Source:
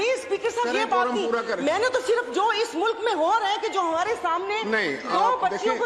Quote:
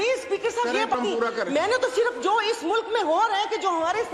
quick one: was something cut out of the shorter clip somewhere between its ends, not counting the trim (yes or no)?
yes